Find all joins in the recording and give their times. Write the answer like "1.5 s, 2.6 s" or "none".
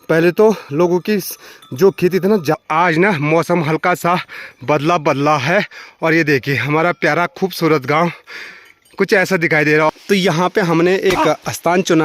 2.6 s, 9.9 s